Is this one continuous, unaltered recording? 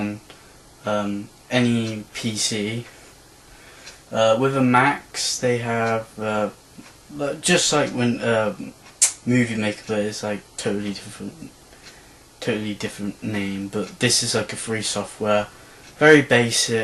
yes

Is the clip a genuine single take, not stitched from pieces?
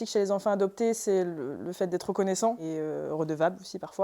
no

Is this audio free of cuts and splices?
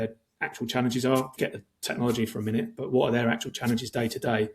no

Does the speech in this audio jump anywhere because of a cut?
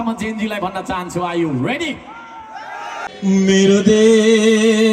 yes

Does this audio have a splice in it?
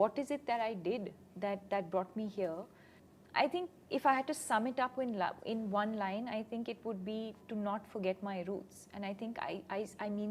no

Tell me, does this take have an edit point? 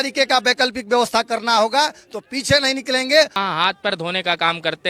yes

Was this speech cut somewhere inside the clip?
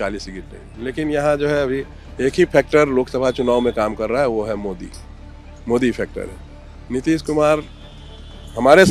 no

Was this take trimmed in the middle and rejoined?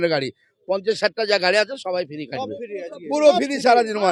no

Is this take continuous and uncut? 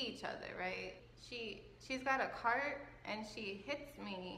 no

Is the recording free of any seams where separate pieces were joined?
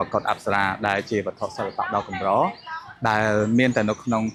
yes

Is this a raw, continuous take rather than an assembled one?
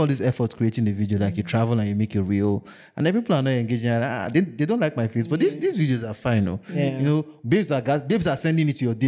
yes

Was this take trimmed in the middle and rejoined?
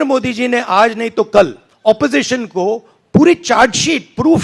yes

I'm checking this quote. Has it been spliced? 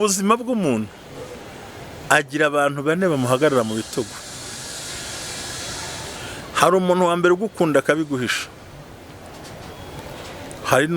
no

